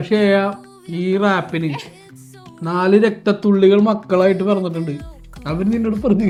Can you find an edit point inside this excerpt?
no; 0 cuts

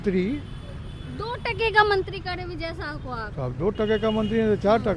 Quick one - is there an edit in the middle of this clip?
no; 0 cuts

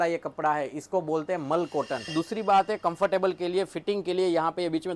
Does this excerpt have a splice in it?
yes; 1 cut; at 2.1 s

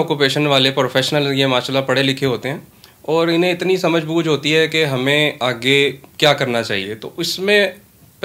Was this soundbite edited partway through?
no; 0 cuts

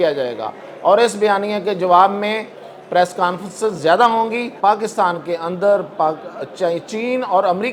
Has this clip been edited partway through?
yes; 1 cut; at 4.6 s

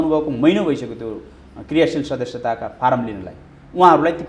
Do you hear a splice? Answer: no; 0 cuts

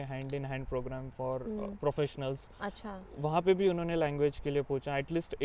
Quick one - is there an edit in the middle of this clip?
no; 0 cuts

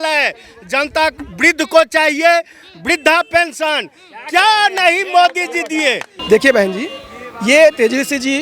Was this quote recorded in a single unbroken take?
no; 1 cut; at 6.1 s

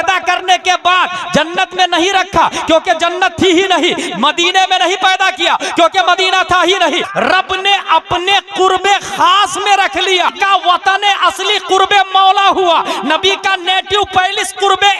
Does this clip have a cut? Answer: yes; 2 cuts; at 7.1 s, 10.3 s

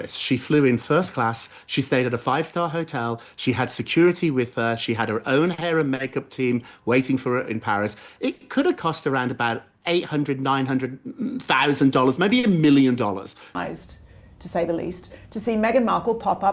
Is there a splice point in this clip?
yes; 1 cut; at 13.4 s

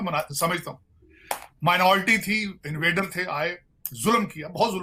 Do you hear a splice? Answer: no; 0 cuts

